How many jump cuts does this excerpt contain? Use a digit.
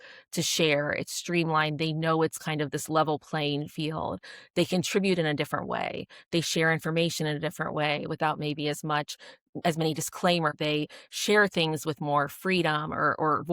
1